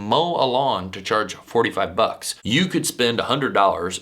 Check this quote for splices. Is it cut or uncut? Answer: cut